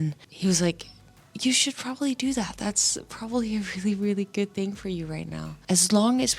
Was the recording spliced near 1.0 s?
no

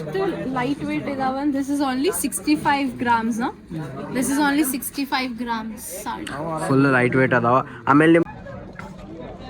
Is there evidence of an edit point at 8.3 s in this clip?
yes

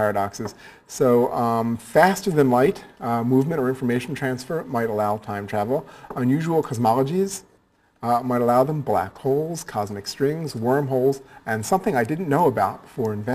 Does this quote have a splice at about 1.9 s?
no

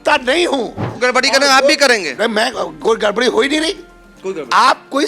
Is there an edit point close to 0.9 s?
yes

